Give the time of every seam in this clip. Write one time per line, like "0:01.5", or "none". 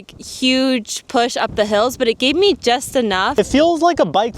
0:03.4